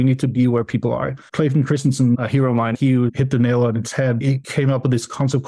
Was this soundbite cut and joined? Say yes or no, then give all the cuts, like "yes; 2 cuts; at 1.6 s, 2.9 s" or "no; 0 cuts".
yes; 3 cuts; at 1.3 s, 2.6 s, 4.3 s